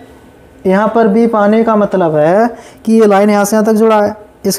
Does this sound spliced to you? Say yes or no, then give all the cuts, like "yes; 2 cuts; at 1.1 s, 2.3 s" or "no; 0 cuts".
no; 0 cuts